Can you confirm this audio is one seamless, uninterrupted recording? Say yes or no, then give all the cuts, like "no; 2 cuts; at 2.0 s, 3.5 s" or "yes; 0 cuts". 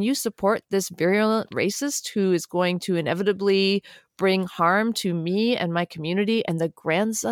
yes; 0 cuts